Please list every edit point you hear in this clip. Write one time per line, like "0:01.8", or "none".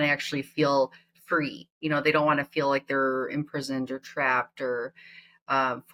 none